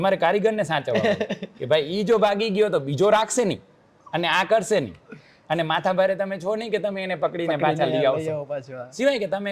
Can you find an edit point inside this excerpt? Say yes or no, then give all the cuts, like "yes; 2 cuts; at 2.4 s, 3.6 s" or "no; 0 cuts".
no; 0 cuts